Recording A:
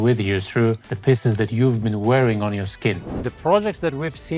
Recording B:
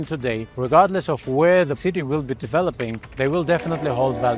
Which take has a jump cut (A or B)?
A